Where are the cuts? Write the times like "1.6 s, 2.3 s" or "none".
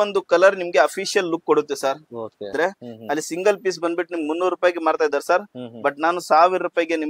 2.5 s